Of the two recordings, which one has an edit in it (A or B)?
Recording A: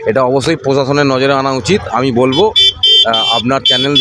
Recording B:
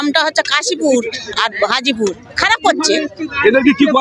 B